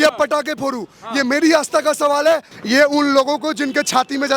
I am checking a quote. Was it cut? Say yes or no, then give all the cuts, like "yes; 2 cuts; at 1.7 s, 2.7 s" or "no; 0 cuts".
yes; 1 cut; at 2.5 s